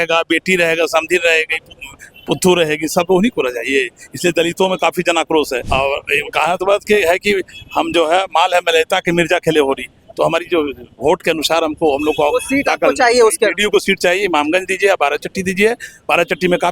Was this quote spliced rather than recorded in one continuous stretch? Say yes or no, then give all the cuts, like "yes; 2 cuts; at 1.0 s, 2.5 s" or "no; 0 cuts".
yes; 1 cut; at 5.6 s